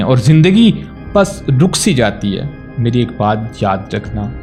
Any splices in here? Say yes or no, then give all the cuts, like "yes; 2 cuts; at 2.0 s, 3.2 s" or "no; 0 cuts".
no; 0 cuts